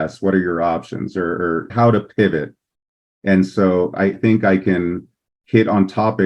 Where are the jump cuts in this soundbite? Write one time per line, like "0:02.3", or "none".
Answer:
0:01.7
0:04.2